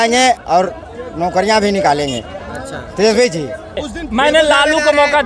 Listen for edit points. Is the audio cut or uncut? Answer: cut